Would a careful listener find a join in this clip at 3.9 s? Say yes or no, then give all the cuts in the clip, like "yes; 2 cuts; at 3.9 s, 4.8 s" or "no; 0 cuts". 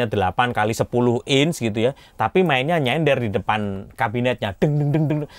no; 0 cuts